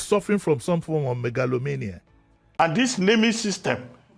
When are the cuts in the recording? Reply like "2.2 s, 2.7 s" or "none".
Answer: 2.6 s